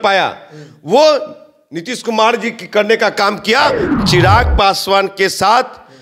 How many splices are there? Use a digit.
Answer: 1